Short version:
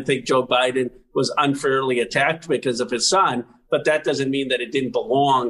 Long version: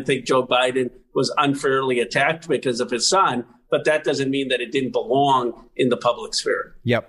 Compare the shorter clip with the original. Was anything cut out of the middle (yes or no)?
no